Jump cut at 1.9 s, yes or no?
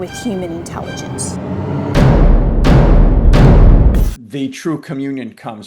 no